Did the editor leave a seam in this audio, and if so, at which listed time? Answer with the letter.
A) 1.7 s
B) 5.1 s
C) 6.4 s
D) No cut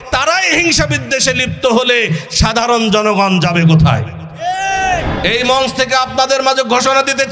B